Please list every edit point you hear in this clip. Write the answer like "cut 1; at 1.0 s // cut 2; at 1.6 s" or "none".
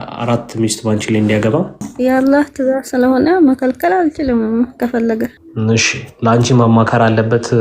cut 1; at 1.8 s // cut 2; at 5.4 s